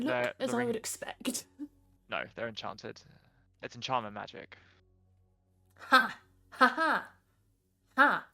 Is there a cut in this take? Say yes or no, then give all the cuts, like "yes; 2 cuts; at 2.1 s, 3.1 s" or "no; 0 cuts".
yes; 1 cut; at 1.9 s